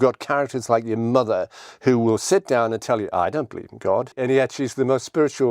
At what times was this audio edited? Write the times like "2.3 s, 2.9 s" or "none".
4.1 s